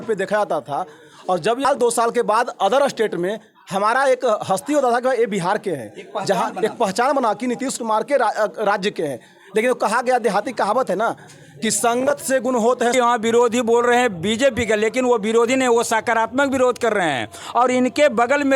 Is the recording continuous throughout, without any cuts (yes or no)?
no